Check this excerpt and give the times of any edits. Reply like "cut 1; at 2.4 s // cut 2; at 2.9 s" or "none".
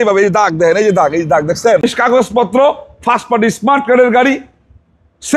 cut 1; at 1.8 s